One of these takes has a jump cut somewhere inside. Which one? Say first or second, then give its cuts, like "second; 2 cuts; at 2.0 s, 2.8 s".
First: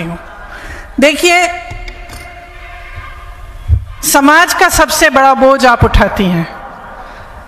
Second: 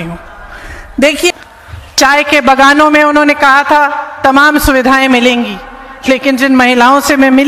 second; 1 cut; at 1.3 s